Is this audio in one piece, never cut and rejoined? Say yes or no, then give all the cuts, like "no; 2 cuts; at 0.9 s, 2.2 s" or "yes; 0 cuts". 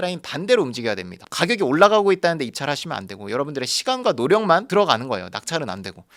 yes; 0 cuts